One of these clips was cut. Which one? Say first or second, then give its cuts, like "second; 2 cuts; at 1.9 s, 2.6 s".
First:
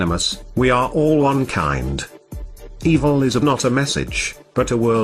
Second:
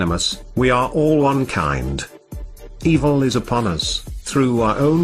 second; 1 cut; at 3.4 s